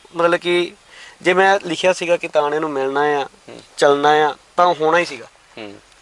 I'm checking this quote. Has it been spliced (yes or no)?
no